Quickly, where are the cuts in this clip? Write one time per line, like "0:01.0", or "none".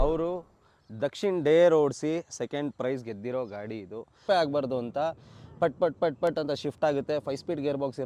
0:04.2